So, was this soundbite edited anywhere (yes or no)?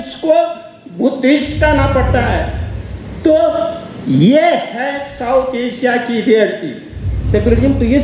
yes